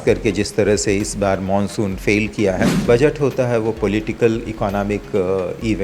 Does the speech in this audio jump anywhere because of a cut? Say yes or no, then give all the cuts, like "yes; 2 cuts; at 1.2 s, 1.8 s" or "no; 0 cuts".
yes; 1 cut; at 2.8 s